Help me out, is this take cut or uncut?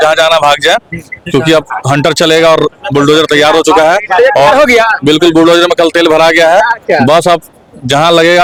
uncut